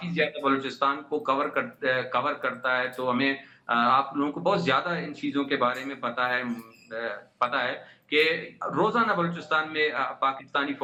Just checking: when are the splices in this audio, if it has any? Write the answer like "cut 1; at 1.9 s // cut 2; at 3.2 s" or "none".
none